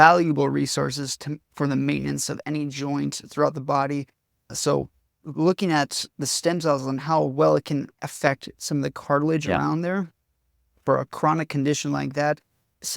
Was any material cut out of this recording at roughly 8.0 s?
yes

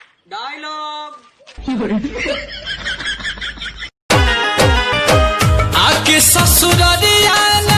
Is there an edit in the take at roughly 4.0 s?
yes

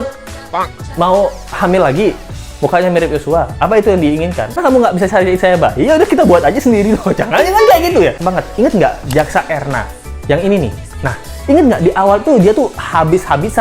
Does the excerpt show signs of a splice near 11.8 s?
no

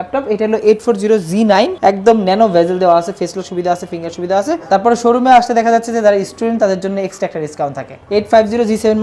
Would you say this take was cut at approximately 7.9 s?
yes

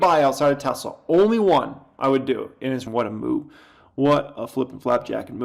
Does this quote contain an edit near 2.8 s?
yes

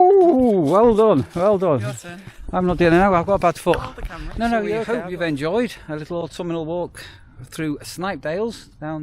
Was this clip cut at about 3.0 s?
no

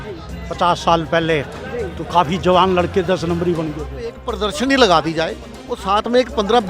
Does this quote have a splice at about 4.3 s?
yes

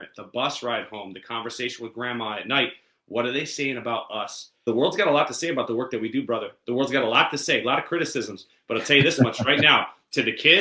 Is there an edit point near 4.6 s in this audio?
yes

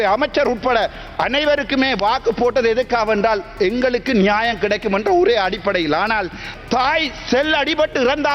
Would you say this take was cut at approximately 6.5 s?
yes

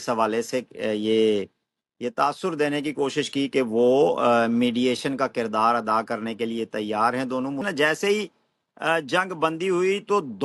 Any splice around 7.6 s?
yes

